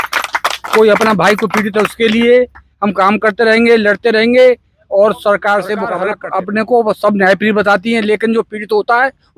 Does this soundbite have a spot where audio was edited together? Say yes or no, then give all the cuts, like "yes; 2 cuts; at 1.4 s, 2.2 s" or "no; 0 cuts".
yes; 1 cut; at 6.1 s